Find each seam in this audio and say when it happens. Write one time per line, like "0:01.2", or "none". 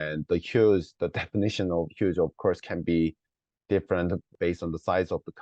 0:00.9
0:04.3